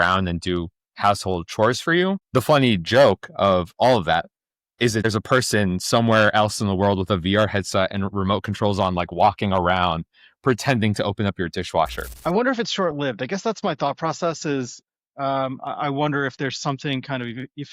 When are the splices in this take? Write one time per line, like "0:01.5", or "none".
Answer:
0:02.2
0:05.0
0:12.1